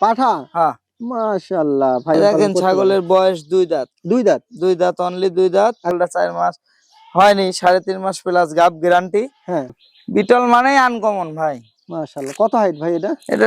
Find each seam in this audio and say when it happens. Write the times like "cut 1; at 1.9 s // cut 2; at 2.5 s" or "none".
cut 1; at 2.2 s // cut 2; at 5.9 s // cut 3; at 9.7 s